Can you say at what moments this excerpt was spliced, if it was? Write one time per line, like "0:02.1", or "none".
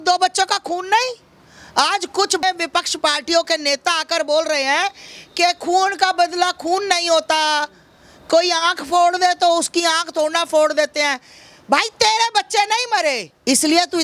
none